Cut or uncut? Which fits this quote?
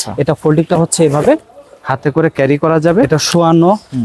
cut